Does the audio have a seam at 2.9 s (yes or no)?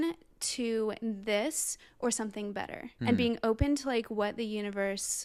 no